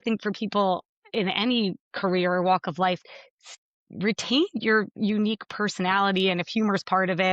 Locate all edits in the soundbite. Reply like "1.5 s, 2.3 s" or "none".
3.0 s